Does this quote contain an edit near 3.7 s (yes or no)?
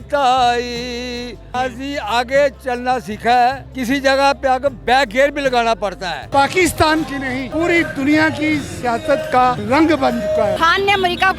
yes